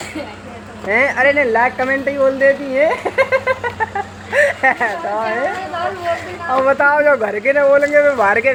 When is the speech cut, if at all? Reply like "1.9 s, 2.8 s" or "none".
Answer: none